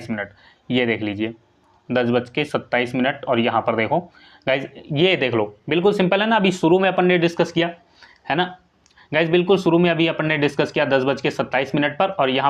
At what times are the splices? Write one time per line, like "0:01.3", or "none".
none